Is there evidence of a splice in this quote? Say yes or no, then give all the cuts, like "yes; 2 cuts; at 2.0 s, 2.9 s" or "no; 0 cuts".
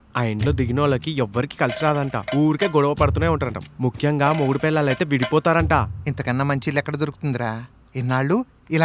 no; 0 cuts